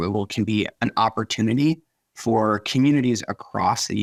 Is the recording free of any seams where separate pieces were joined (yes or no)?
yes